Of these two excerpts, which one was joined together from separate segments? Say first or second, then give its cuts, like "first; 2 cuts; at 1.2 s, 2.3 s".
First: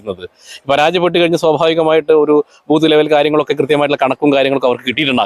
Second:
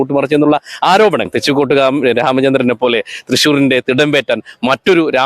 second; 1 cut; at 1.3 s